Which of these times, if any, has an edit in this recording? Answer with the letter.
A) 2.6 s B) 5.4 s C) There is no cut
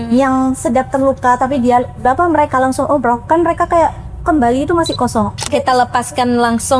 B